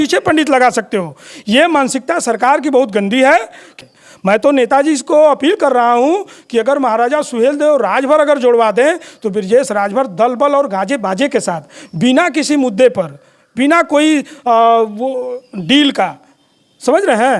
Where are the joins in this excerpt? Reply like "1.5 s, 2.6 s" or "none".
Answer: 3.7 s